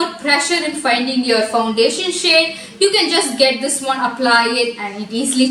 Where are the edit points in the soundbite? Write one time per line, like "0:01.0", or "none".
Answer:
none